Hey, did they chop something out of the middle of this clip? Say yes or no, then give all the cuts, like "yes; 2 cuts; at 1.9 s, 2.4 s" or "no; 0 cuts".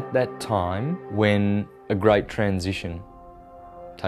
yes; 1 cut; at 1.0 s